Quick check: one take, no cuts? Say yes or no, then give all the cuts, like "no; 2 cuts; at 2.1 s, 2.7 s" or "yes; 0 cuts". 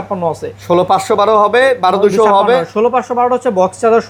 yes; 0 cuts